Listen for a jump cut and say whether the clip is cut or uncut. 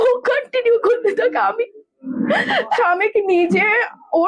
cut